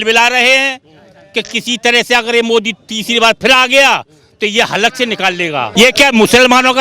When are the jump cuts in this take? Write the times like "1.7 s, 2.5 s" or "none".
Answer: 5.7 s